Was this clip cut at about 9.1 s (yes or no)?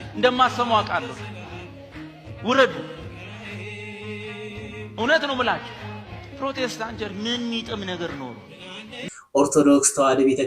yes